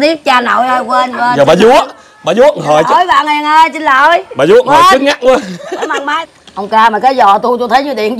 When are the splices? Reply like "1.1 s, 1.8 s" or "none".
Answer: 6.1 s